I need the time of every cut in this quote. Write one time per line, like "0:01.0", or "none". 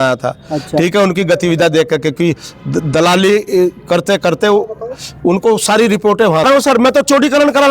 0:06.5